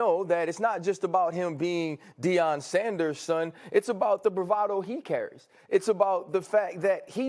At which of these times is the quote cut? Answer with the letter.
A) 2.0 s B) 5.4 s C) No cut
C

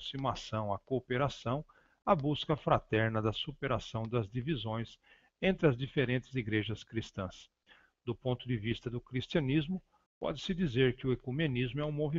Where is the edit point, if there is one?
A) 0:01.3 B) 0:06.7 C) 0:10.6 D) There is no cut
B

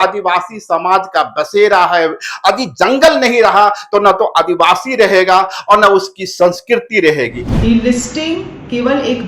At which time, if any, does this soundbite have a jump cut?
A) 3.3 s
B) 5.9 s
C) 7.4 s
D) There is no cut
C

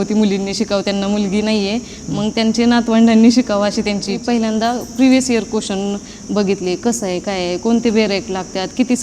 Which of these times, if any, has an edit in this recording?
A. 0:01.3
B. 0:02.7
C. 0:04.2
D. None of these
C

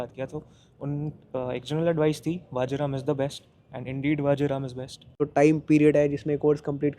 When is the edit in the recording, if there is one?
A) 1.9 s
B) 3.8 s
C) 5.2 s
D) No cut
C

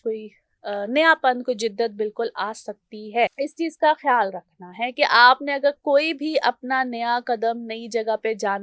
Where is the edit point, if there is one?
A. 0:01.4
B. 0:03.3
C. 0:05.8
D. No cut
B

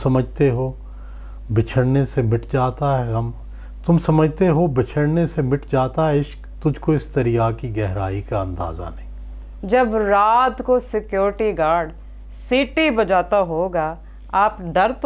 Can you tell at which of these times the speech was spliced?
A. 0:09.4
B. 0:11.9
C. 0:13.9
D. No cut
A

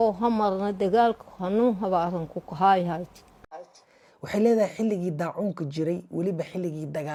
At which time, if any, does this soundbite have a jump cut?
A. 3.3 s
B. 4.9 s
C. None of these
C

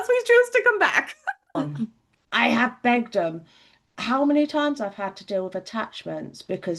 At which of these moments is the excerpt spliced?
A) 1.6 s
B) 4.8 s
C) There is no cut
A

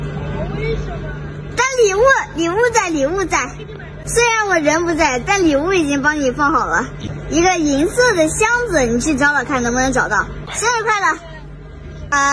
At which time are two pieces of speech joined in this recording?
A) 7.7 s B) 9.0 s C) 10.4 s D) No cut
C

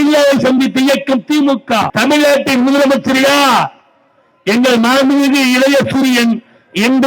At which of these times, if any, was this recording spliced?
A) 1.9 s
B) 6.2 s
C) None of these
A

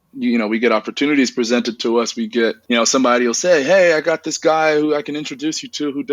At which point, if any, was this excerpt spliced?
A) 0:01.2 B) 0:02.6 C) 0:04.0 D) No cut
B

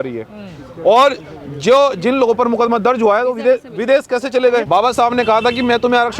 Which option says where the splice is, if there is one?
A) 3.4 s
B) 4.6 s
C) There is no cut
B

